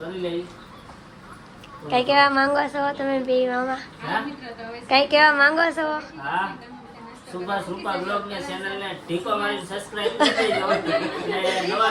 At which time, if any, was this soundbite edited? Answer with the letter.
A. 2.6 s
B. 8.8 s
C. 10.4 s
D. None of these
D